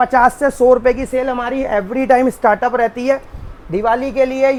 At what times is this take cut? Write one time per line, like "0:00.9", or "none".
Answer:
none